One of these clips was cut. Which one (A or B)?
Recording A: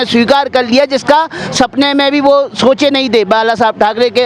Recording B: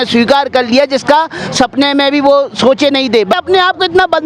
B